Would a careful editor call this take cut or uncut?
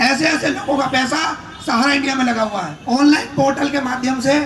cut